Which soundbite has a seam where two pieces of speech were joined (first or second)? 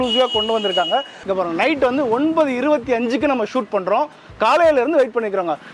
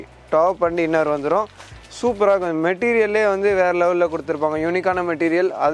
first